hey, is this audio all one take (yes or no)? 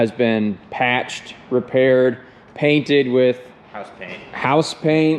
yes